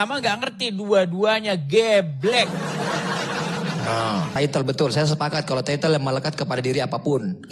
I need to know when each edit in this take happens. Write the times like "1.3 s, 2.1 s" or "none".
4.3 s